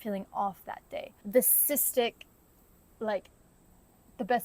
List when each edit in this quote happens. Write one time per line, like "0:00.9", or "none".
0:01.2